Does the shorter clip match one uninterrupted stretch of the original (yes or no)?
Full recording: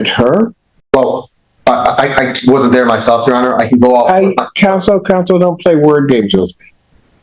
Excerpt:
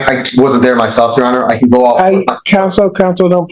yes